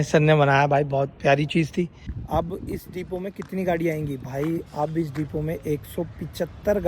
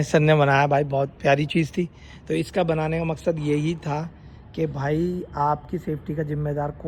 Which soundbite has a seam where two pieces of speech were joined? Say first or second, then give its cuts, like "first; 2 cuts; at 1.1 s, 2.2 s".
first; 1 cut; at 2.1 s